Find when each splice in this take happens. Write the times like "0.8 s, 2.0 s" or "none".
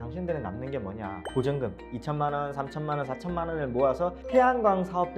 1.2 s, 4.2 s